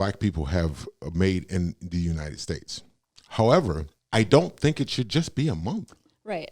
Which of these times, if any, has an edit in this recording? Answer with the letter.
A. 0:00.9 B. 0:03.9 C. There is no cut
B